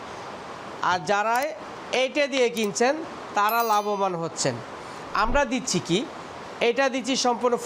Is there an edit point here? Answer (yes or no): no